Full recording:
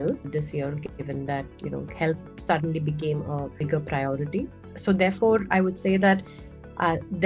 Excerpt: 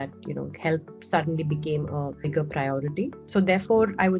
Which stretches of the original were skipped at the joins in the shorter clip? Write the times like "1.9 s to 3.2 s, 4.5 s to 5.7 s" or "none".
4.6 s to 4.7 s